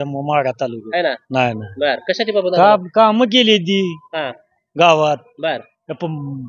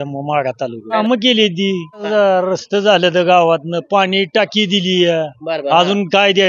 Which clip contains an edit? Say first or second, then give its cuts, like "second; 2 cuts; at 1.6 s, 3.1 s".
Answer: second; 2 cuts; at 1.0 s, 2.0 s